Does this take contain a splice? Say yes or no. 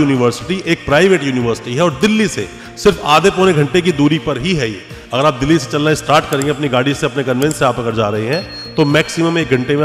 no